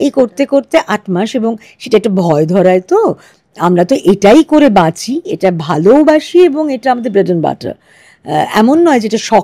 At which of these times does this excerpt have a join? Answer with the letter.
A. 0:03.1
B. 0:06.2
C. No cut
C